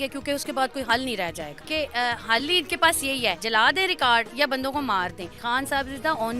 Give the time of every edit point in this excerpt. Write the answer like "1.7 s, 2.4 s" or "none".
1.6 s, 3.4 s, 5.4 s